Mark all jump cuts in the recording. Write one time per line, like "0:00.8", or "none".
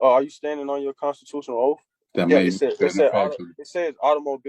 0:02.0